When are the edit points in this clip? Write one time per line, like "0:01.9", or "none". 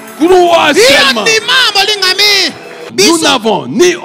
0:02.8